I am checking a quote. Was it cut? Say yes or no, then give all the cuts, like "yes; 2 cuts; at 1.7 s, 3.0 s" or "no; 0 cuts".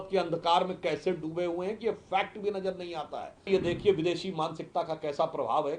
yes; 1 cut; at 3.5 s